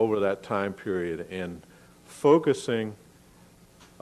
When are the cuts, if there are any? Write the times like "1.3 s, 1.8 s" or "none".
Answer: none

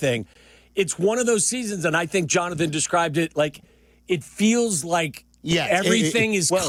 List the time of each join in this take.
none

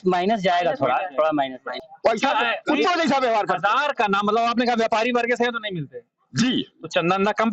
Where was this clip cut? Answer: 1.9 s

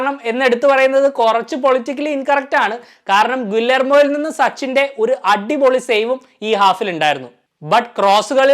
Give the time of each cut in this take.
none

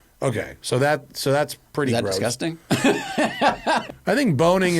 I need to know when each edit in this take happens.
3.9 s

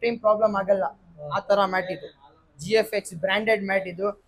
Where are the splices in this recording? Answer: none

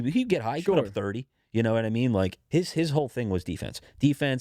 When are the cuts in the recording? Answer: 2.4 s

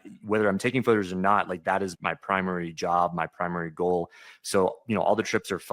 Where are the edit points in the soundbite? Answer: 1.9 s

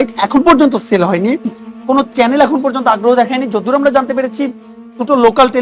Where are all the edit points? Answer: none

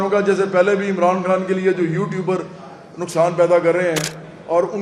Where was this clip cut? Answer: none

